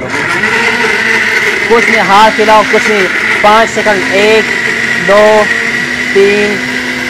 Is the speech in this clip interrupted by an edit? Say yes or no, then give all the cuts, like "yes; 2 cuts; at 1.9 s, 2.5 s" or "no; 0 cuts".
no; 0 cuts